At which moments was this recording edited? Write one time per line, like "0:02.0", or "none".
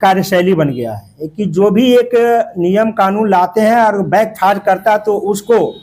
none